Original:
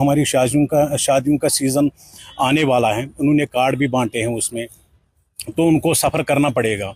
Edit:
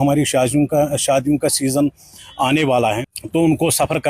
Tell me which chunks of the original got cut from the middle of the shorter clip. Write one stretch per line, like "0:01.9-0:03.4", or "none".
0:03.1-0:05.3

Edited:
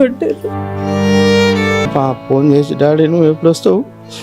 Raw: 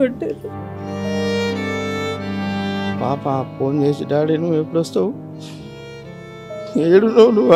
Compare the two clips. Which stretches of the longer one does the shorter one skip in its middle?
0:01.9-0:03.2

